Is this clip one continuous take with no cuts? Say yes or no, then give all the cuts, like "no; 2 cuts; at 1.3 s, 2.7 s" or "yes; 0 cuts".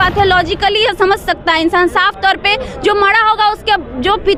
yes; 0 cuts